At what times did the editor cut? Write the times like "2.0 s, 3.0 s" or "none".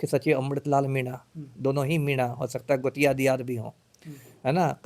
none